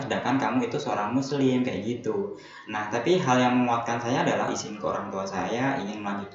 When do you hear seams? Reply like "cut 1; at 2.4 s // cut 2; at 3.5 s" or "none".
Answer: cut 1; at 4.5 s